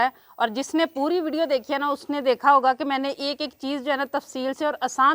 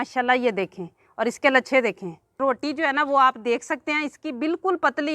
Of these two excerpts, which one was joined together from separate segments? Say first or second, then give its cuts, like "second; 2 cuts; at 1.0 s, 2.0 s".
second; 1 cut; at 2.4 s